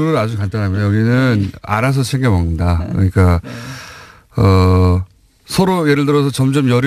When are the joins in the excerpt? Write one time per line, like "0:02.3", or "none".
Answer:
none